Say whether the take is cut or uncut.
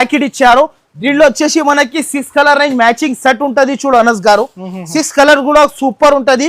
uncut